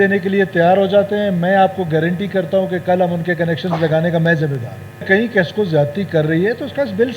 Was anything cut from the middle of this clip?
yes; 1 cut; at 5.0 s

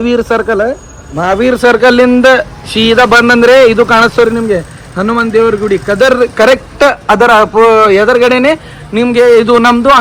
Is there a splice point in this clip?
no; 0 cuts

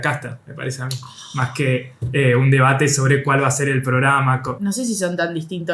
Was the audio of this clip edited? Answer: yes; 1 cut; at 4.5 s

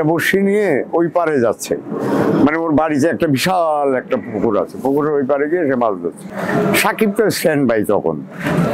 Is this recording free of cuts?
no; 1 cut; at 6.3 s

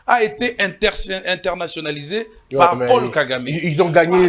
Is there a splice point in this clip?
no; 0 cuts

